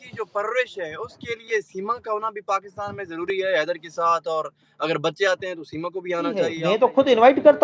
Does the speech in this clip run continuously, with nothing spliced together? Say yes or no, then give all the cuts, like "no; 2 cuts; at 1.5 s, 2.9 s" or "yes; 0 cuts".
no; 1 cut; at 6.6 s